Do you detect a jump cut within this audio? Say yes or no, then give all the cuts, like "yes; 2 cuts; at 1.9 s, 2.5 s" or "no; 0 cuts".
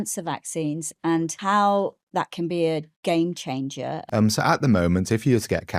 yes; 2 cuts; at 1.4 s, 4.0 s